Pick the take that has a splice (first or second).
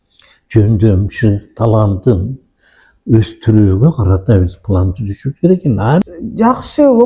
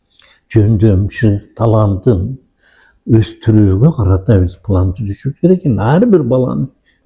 first